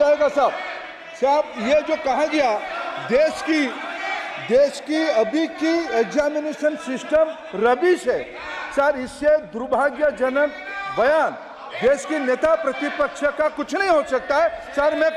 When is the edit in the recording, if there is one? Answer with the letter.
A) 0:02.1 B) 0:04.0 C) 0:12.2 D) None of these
D